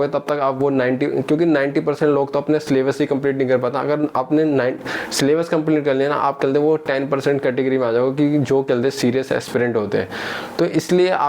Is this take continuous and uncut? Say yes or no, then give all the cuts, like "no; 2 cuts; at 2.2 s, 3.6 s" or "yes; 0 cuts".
yes; 0 cuts